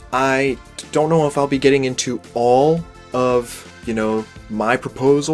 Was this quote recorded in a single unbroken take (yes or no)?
yes